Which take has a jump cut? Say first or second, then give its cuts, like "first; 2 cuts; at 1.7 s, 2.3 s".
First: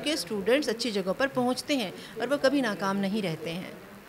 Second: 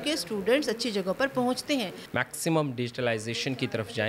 second; 1 cut; at 2.0 s